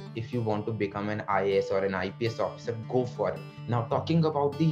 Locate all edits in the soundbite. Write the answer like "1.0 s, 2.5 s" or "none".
3.5 s